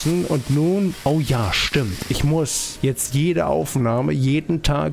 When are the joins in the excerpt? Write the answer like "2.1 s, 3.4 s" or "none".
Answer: 1.0 s, 2.6 s